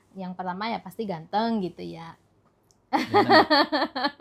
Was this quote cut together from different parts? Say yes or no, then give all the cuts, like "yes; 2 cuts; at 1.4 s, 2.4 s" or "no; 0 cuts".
no; 0 cuts